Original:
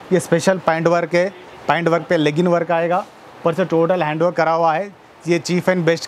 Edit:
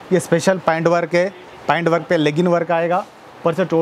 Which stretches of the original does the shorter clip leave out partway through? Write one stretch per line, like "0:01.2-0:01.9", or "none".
none